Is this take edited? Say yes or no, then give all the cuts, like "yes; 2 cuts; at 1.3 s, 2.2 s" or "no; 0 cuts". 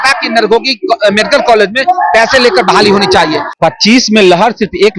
yes; 1 cut; at 3.5 s